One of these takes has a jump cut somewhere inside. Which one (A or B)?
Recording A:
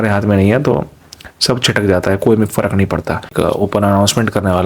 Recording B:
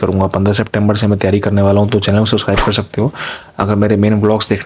A